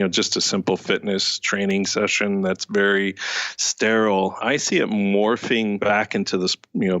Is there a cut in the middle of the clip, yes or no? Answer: yes